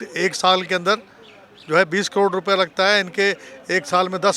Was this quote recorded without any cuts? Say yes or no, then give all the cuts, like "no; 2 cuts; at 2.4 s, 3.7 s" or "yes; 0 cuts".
yes; 0 cuts